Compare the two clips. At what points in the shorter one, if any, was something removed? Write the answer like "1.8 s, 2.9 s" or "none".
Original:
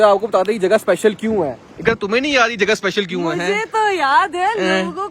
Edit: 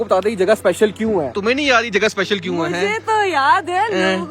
1.4 s

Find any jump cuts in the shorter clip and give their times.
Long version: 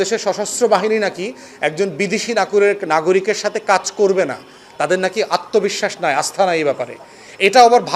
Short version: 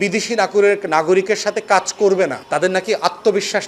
2.6 s

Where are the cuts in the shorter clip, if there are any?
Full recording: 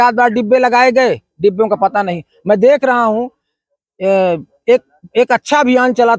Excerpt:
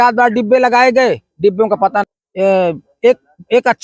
2.2 s

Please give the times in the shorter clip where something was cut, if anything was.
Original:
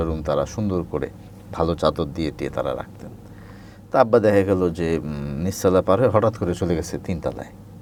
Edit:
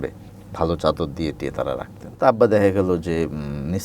2.0 s

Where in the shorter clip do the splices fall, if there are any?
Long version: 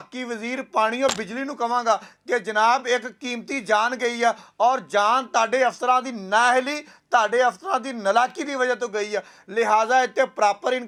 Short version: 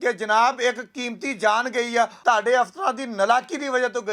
2.1 s

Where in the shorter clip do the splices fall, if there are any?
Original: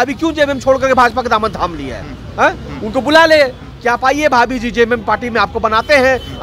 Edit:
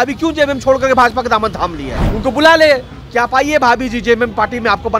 2.0 s

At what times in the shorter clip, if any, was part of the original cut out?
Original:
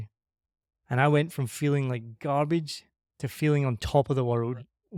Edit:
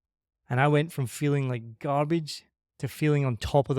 none

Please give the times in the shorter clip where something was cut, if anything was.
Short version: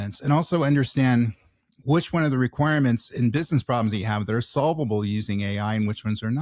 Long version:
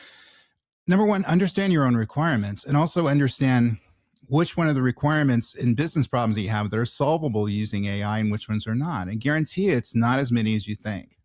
none

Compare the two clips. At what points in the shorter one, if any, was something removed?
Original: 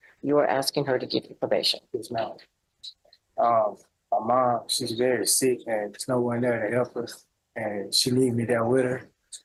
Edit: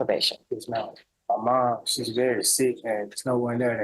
1.1 s

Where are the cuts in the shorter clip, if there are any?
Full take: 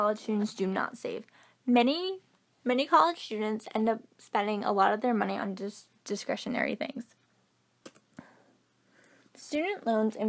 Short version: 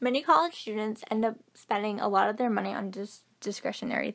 none

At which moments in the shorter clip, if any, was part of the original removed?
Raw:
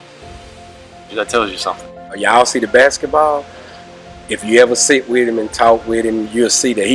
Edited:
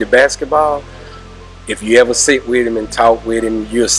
none

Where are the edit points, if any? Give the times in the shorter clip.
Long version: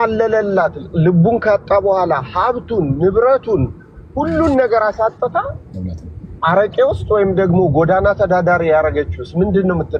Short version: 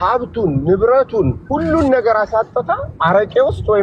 1.4 s, 2.9 s

